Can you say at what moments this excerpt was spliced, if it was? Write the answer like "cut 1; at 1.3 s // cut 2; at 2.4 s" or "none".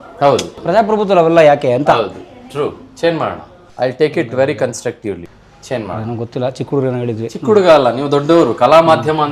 none